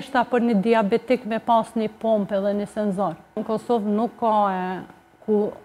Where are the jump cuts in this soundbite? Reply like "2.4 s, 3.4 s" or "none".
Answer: 3.4 s